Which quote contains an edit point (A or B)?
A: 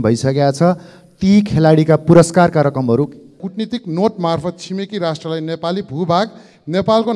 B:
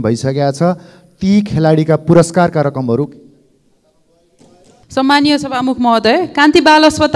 A